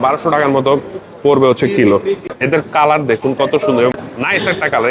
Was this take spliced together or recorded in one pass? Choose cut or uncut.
cut